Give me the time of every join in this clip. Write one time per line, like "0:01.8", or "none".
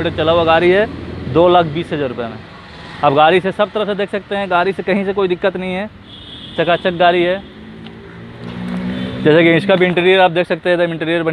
none